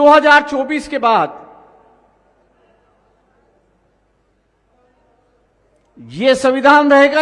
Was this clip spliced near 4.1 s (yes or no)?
no